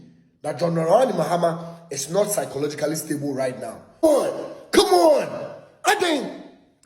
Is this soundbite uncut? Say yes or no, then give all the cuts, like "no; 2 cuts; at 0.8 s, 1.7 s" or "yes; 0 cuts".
yes; 0 cuts